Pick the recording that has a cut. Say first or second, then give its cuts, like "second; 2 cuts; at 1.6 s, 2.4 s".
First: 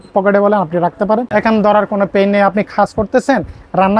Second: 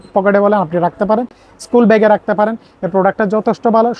first; 1 cut; at 1.3 s